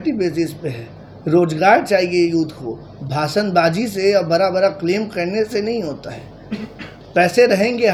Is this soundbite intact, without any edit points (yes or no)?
yes